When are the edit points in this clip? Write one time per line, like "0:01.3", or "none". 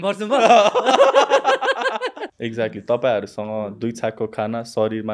0:02.2